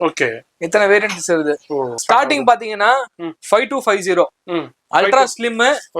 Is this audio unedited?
no; 1 cut; at 2.0 s

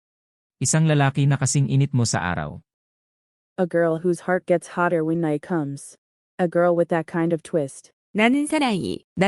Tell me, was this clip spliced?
no; 0 cuts

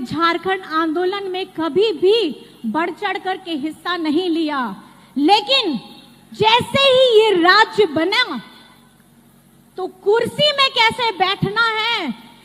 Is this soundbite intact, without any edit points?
yes; 0 cuts

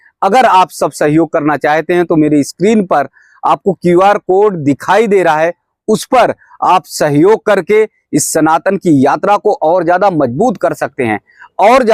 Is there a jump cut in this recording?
no; 0 cuts

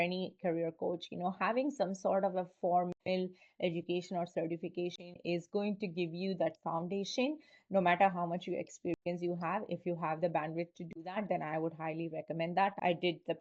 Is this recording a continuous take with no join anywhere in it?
yes; 0 cuts

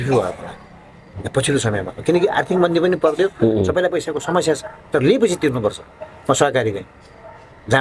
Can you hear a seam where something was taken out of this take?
no; 0 cuts

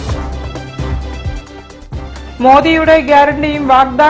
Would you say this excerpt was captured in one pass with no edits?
yes; 0 cuts

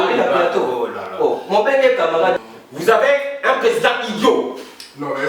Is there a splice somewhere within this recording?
yes; 1 cut; at 2.4 s

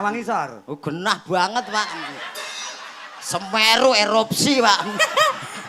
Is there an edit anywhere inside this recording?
no; 0 cuts

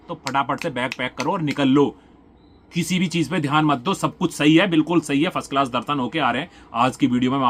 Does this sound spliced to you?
no; 0 cuts

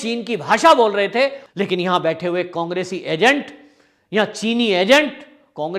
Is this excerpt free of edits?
no; 1 cut; at 1.4 s

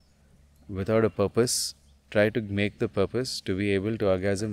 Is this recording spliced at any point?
no; 0 cuts

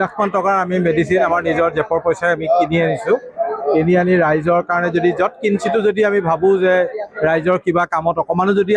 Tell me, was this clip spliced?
no; 0 cuts

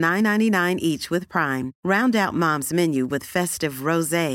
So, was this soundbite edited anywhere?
no; 0 cuts

